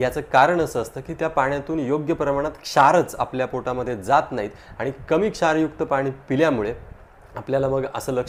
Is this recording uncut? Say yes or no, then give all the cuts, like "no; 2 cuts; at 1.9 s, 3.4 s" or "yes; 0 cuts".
yes; 0 cuts